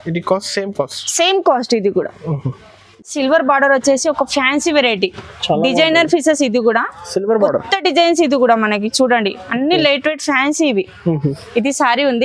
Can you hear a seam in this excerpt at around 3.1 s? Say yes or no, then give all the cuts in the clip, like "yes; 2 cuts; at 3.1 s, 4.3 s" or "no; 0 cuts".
yes; 1 cut; at 3.1 s